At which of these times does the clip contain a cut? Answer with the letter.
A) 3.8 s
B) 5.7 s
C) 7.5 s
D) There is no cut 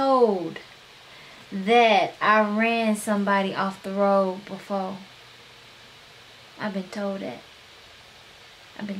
D